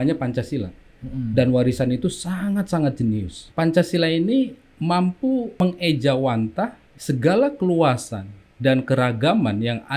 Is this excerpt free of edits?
no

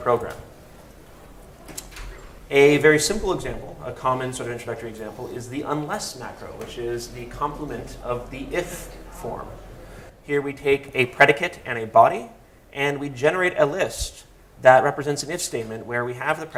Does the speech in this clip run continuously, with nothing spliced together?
yes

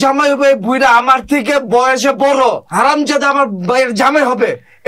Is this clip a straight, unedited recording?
no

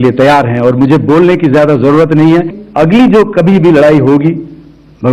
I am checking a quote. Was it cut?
yes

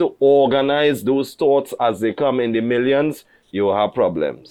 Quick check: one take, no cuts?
yes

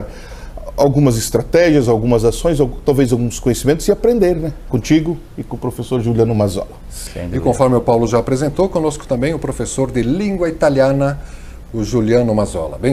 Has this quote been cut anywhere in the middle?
yes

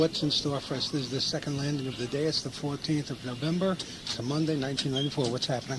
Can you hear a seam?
no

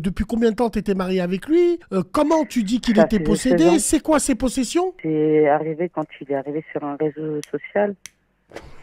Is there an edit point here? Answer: yes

